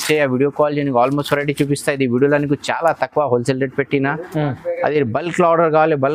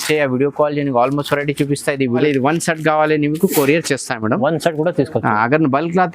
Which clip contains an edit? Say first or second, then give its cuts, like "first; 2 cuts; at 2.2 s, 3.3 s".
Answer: second; 1 cut; at 2.2 s